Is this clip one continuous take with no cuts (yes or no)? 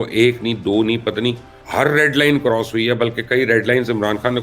yes